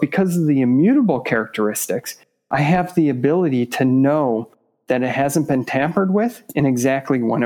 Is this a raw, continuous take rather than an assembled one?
yes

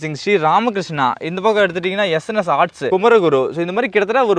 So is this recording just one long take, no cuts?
no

